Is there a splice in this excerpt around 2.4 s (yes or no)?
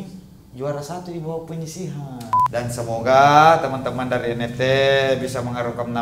yes